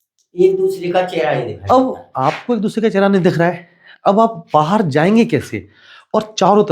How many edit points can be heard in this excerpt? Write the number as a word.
zero